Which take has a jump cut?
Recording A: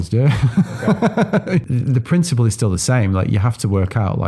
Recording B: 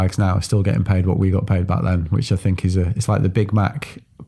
A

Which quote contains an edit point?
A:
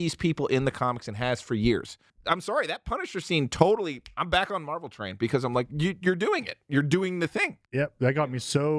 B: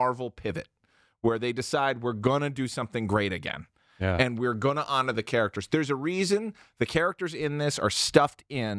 A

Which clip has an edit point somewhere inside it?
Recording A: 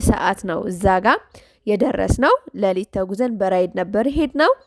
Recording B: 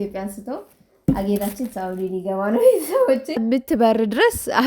B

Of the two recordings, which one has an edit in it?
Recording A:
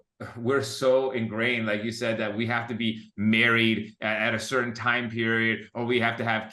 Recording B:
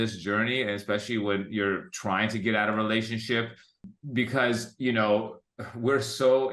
B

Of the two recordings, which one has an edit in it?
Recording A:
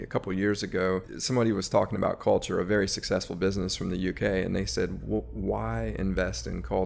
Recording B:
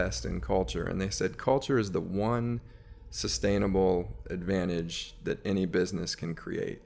A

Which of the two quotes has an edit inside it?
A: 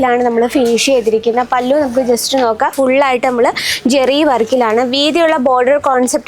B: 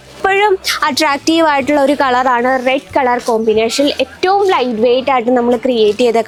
A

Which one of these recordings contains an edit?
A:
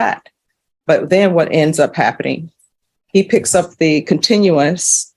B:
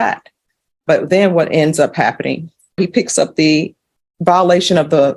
B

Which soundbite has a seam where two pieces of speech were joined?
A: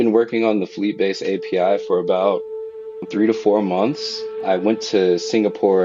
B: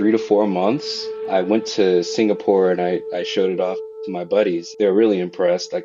B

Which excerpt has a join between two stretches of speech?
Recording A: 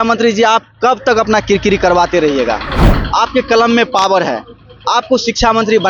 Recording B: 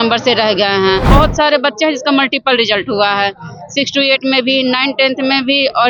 B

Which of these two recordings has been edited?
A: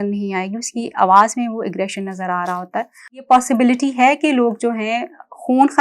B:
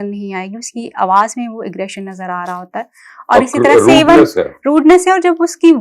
A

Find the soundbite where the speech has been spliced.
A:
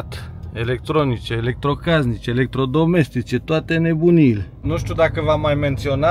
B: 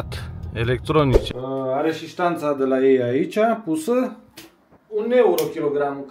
B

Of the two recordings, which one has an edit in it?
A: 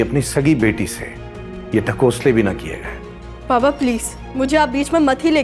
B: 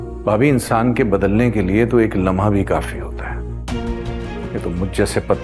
B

